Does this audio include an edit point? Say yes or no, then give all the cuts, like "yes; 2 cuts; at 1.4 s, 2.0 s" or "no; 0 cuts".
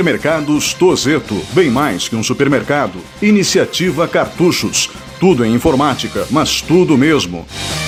no; 0 cuts